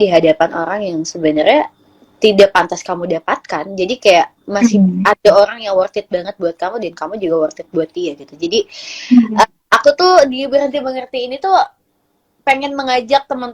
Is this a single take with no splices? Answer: yes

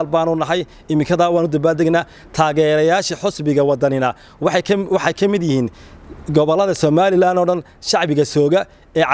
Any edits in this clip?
no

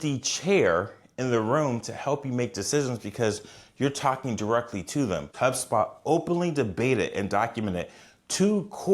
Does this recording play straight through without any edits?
no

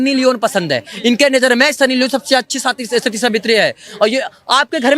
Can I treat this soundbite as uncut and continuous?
yes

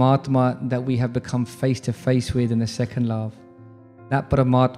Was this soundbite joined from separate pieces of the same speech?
no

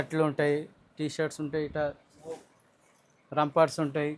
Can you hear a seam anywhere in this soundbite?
no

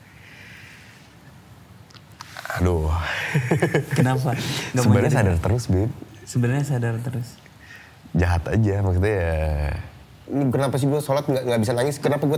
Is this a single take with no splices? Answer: no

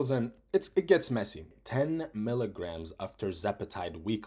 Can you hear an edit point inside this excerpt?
yes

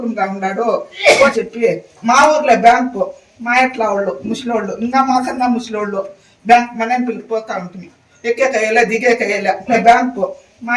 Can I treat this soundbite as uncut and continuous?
no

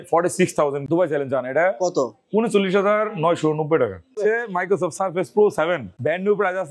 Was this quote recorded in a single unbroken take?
no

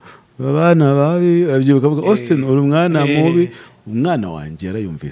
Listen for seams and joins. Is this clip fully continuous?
yes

